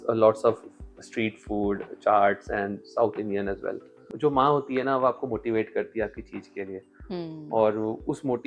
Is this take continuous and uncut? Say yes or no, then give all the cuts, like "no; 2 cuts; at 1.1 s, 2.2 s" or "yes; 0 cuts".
no; 1 cut; at 4.0 s